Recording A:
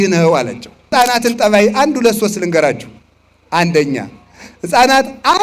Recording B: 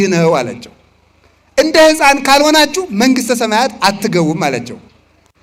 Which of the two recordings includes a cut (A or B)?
A